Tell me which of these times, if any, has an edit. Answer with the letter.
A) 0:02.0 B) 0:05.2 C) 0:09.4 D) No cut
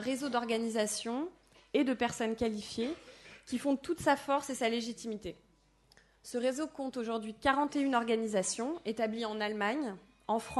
A